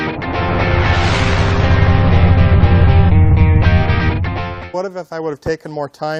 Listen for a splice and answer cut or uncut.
uncut